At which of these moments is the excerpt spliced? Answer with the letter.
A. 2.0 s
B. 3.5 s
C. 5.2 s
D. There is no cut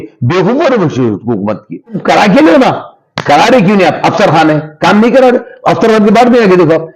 A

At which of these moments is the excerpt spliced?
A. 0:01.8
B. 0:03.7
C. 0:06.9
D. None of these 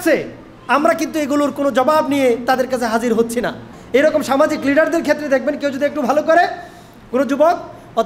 B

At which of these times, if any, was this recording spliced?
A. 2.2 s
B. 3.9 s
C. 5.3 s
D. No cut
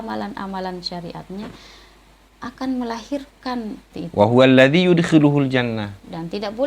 B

